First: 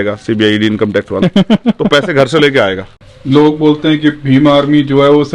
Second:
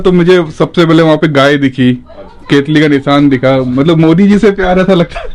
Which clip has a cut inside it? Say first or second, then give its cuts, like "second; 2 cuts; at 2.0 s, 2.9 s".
first; 1 cut; at 2.9 s